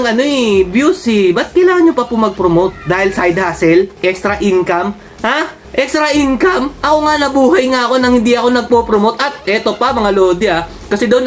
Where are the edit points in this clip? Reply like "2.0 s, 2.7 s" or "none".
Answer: 3.9 s